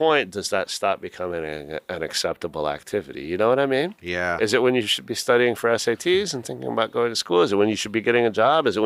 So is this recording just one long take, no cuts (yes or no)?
yes